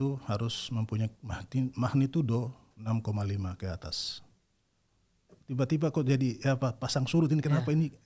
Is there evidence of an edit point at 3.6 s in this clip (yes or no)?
no